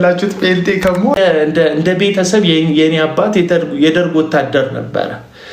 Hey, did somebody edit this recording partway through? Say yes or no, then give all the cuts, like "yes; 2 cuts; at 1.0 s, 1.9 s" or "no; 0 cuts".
yes; 1 cut; at 1.2 s